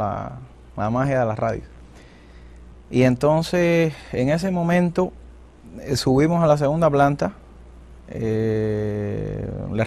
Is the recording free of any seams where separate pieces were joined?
yes; 0 cuts

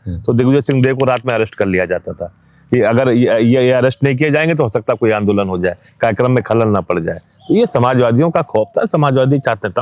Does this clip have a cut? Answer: no; 0 cuts

